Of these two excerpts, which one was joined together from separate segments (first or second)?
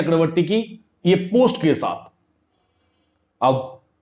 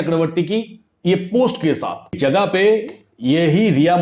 second